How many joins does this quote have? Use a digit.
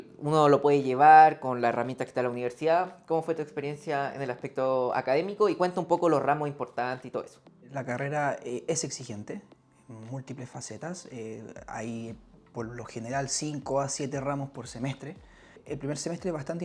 2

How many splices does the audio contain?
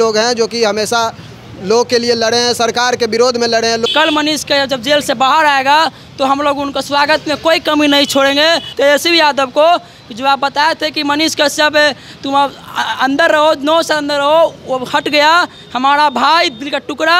2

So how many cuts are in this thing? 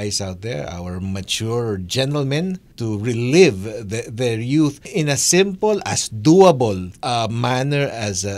3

